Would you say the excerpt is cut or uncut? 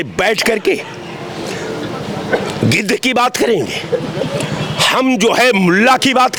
uncut